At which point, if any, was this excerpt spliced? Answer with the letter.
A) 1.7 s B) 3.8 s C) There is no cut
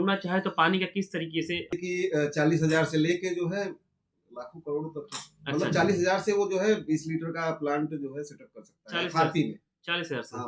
A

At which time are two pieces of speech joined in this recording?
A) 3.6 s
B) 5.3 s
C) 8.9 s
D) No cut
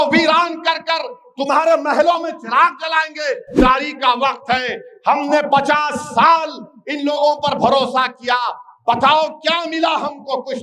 A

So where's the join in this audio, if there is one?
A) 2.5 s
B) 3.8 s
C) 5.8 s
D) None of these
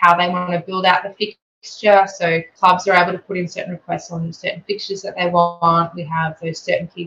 A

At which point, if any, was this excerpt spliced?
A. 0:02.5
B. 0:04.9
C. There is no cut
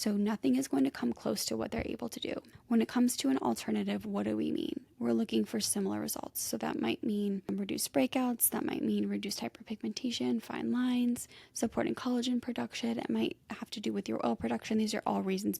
A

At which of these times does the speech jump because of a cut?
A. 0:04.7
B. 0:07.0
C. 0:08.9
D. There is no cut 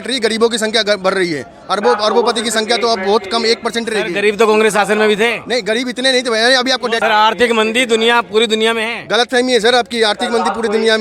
B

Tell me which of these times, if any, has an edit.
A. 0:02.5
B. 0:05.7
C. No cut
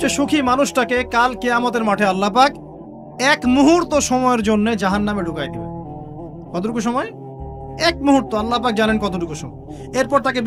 C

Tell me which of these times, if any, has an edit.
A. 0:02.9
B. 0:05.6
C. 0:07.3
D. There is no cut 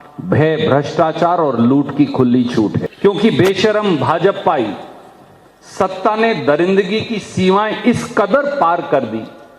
A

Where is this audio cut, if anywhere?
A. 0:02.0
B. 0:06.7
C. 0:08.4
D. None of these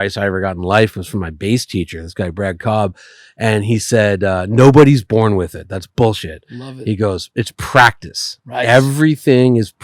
D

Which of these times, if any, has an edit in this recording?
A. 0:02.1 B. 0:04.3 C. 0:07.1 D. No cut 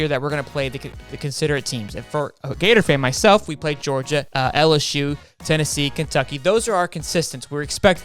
B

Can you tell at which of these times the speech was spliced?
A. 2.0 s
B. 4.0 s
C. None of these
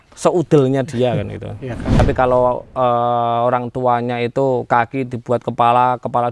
A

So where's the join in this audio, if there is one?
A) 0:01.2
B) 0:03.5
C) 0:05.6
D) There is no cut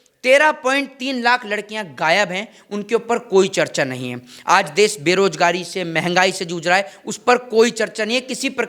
D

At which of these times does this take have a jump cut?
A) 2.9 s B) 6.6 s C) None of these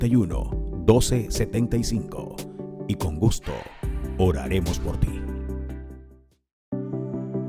B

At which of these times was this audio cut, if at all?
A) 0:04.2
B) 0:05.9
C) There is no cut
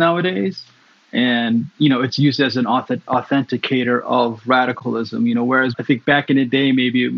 C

